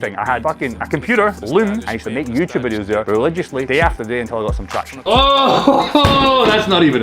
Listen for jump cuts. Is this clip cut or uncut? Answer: cut